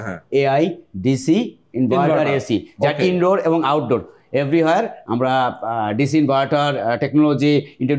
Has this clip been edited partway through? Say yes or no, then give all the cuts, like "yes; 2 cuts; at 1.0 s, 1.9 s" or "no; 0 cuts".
no; 0 cuts